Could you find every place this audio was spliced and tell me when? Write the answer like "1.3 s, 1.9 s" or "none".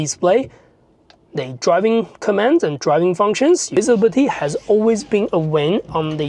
3.7 s